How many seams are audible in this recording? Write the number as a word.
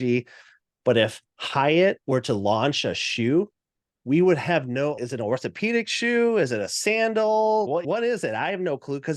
one